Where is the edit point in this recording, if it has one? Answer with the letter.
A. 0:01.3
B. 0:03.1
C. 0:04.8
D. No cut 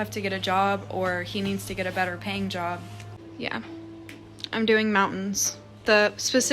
B